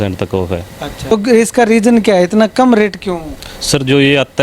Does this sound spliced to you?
yes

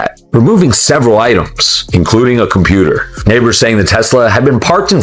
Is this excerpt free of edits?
yes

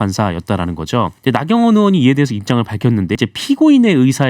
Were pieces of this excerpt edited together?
yes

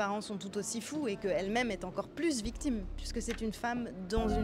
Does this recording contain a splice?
no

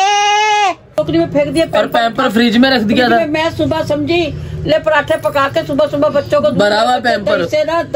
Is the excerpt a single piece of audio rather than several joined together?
no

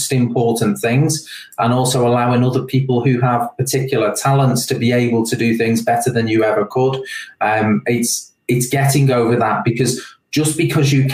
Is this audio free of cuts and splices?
yes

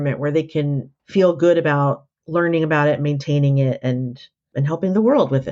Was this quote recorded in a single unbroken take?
no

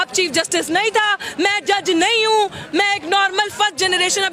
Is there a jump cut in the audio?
no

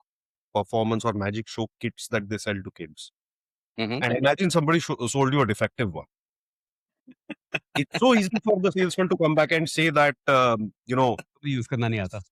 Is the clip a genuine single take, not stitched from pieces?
yes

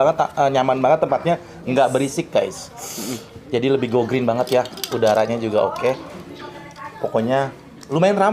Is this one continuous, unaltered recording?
yes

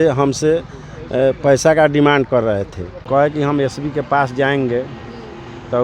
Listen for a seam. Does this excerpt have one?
yes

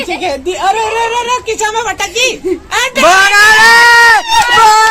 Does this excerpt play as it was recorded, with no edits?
yes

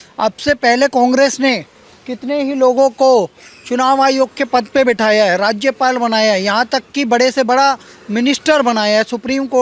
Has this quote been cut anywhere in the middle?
no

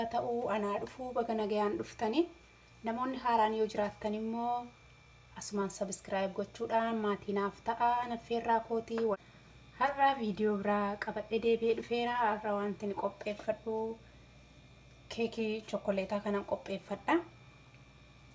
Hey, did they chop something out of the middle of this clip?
no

